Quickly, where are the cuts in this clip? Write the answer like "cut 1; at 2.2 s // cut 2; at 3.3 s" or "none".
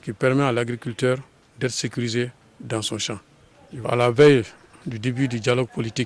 cut 1; at 3.8 s